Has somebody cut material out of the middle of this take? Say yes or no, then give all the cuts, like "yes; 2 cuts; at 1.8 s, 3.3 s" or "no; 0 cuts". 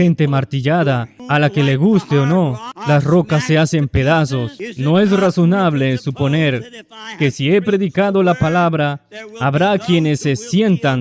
yes; 3 cuts; at 1.1 s, 2.7 s, 4.6 s